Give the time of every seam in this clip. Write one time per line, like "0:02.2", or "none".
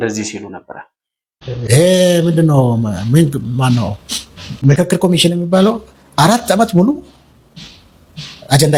none